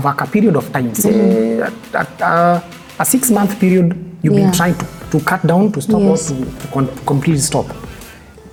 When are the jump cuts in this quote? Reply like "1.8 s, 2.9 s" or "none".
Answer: none